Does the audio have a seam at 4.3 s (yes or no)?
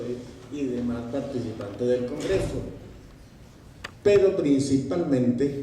no